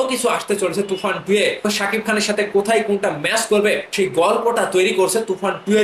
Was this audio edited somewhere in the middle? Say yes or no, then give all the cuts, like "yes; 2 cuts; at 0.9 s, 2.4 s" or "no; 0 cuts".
yes; 2 cuts; at 1.6 s, 3.9 s